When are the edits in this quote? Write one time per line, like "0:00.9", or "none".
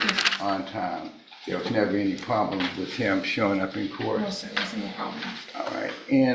none